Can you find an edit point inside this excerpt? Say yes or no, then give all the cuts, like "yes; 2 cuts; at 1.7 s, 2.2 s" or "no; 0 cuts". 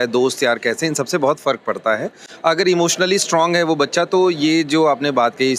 no; 0 cuts